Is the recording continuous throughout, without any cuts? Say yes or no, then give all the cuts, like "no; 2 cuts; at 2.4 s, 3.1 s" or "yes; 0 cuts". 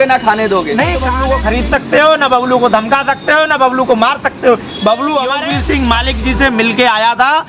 no; 2 cuts; at 1.1 s, 5.5 s